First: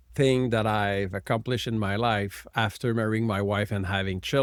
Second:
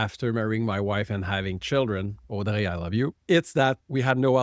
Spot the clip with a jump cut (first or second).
second